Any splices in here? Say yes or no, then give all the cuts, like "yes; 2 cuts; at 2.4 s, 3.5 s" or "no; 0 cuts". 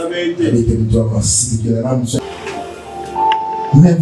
yes; 1 cut; at 2.2 s